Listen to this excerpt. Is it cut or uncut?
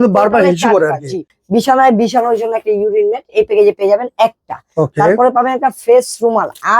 cut